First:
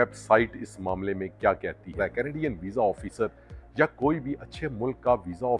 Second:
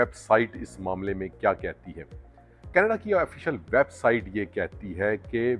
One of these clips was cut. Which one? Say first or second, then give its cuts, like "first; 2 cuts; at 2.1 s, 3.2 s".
first; 1 cut; at 1.9 s